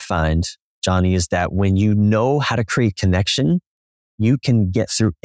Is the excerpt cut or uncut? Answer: uncut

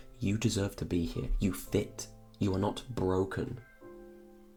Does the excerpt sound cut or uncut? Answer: uncut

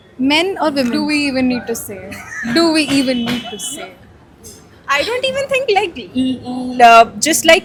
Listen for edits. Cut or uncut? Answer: uncut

